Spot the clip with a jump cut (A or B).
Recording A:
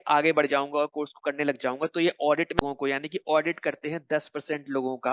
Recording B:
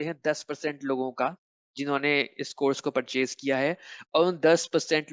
A